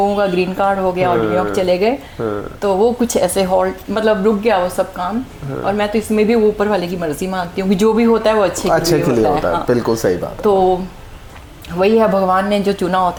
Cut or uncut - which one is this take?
uncut